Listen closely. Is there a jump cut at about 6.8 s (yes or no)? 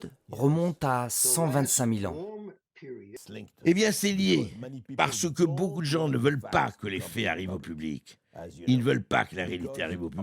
no